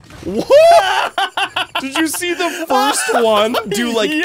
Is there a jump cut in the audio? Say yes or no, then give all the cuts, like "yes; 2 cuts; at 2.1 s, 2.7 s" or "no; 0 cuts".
no; 0 cuts